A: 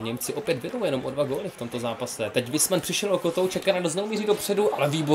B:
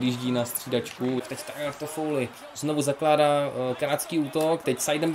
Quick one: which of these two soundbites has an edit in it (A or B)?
B